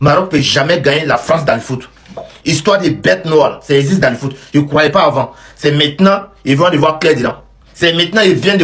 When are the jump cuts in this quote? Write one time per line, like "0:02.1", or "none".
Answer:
none

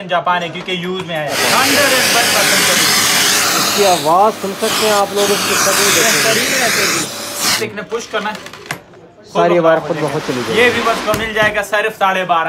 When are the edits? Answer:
0:01.4
0:07.6

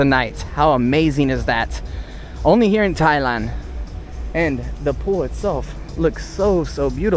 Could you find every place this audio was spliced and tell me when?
none

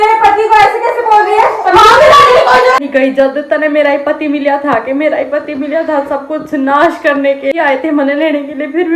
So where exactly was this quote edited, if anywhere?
0:02.8
0:07.6

